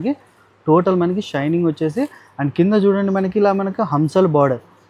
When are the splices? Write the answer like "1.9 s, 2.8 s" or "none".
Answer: none